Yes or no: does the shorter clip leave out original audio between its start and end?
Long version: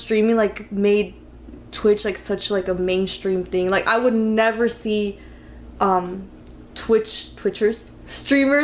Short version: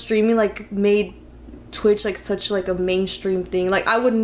no